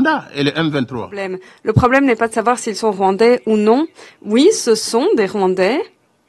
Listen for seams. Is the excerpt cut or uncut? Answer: cut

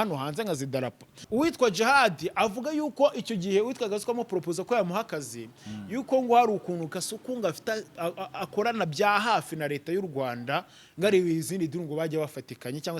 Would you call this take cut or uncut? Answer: cut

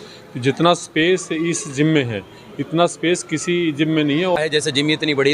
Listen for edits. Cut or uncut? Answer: cut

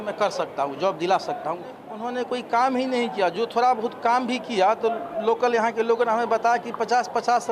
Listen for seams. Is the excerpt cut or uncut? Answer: cut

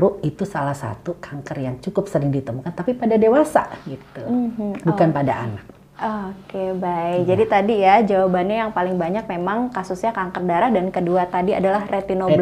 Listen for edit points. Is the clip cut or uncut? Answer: uncut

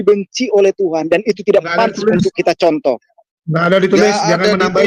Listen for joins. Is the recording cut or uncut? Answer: uncut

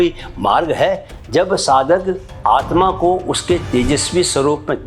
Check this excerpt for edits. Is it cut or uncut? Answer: cut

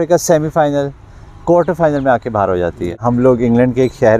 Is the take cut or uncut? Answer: cut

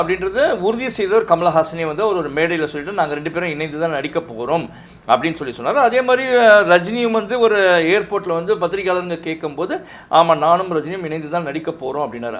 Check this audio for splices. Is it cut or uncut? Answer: uncut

